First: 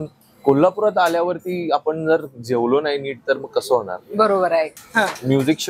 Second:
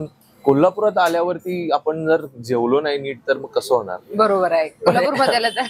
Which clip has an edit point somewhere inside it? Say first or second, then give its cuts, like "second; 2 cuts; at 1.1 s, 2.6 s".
first; 1 cut; at 4.7 s